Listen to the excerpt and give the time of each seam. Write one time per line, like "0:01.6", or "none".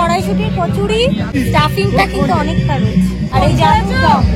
0:01.3
0:03.3

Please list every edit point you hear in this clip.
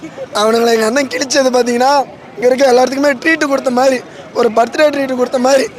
none

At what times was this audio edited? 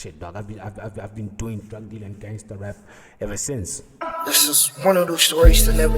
0:03.8

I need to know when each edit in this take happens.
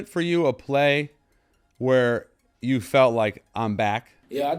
none

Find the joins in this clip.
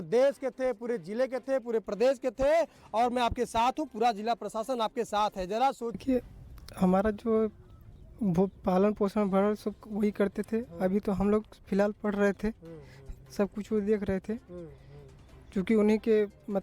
0:06.0

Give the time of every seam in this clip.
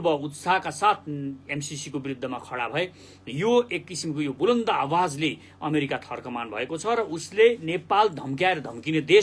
none

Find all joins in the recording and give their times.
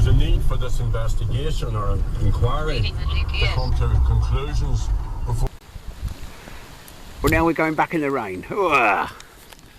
0:05.5

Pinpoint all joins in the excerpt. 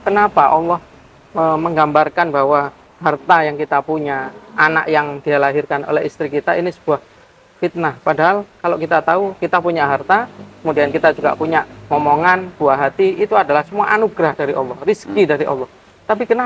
none

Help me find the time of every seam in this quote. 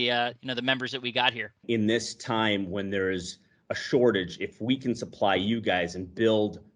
0:01.6

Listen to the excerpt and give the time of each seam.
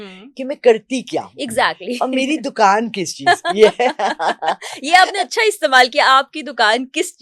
none

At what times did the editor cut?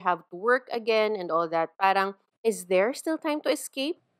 0:02.2

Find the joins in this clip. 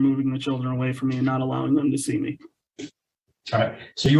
none

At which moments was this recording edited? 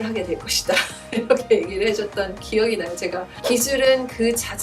0:03.3

